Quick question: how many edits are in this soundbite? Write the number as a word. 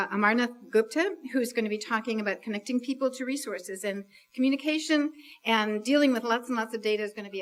zero